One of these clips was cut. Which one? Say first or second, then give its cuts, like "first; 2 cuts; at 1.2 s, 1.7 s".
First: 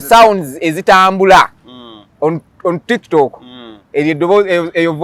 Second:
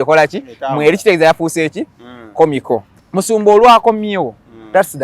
second; 1 cut; at 3.0 s